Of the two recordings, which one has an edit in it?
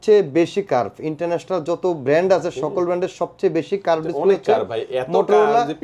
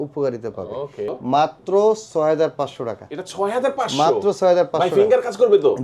second; 1 cut; at 0.9 s

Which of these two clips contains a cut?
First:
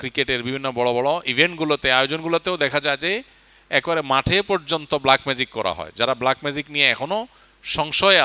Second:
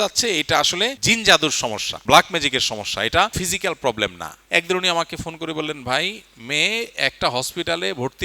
second; 4 cuts; at 1.0 s, 1.9 s, 3.4 s, 4.3 s

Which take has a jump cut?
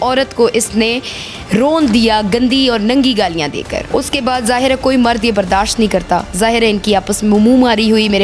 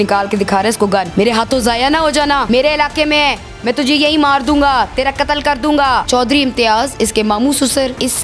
second; 3 cuts; at 1.1 s, 2.4 s, 6.0 s

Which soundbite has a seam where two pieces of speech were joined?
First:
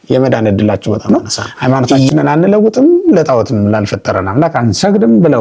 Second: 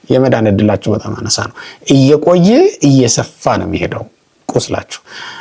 first; 1 cut; at 1.0 s

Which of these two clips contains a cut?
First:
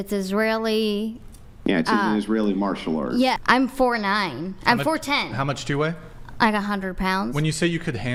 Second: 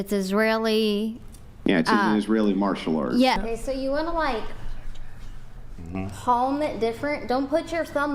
second; 1 cut; at 3.4 s

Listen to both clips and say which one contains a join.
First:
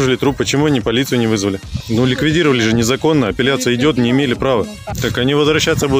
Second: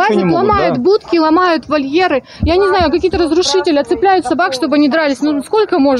first; 2 cuts; at 1.8 s, 4.9 s

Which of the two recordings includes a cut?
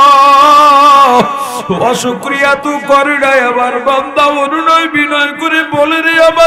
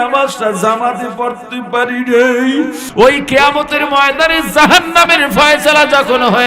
second; 1 cut; at 2.8 s

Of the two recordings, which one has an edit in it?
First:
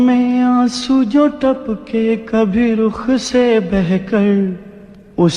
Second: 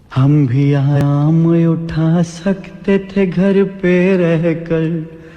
second; 1 cut; at 1.0 s

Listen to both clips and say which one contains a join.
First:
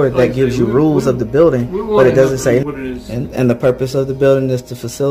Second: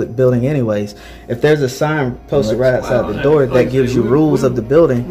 first; 1 cut; at 2.7 s

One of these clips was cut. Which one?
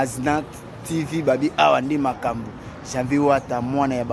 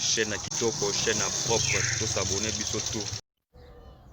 second; 1 cut; at 3.2 s

